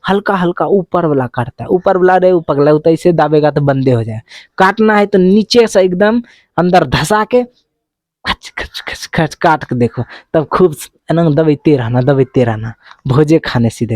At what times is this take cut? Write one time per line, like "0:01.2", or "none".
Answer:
none